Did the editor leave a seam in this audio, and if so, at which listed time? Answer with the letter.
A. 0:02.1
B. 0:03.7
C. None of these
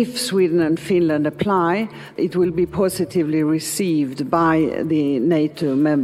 A